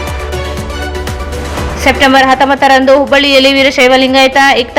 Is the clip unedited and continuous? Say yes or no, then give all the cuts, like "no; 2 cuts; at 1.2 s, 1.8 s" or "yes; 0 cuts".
yes; 0 cuts